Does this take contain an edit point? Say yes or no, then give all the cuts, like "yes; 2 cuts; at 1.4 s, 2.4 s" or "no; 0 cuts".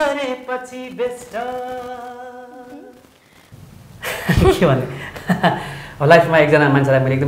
yes; 1 cut; at 3.5 s